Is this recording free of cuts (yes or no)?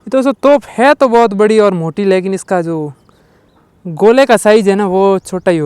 yes